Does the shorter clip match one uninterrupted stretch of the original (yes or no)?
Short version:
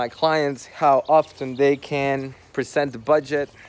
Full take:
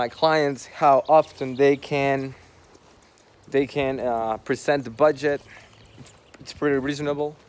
no